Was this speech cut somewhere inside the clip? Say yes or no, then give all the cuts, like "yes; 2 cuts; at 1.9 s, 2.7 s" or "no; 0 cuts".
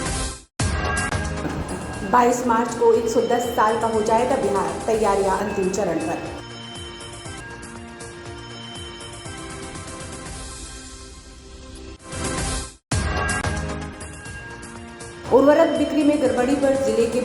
yes; 1 cut; at 1.4 s